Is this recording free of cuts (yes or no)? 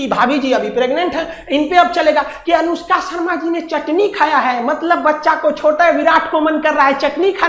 yes